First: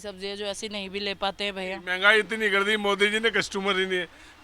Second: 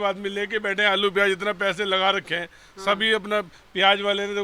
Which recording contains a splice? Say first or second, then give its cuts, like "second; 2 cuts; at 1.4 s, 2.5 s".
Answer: first; 1 cut; at 1.8 s